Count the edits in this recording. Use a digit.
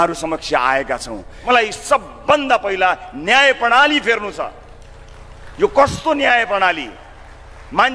1